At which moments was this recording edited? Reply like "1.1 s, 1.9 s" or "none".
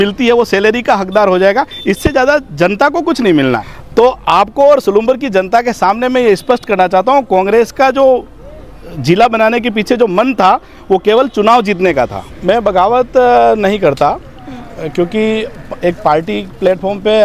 3.7 s, 12.3 s